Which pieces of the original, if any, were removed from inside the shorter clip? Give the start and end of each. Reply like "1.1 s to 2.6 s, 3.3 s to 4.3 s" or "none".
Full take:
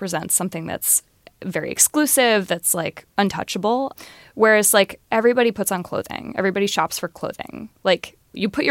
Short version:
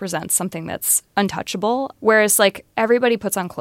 1.0 s to 3.0 s, 4.0 s to 4.3 s